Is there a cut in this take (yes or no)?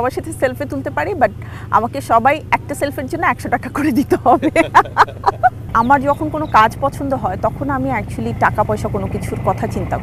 yes